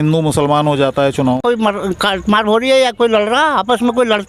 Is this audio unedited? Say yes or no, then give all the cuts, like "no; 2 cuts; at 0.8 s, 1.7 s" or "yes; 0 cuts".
no; 1 cut; at 1.4 s